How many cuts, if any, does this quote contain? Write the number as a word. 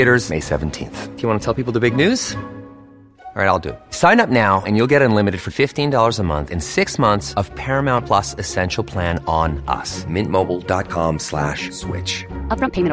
zero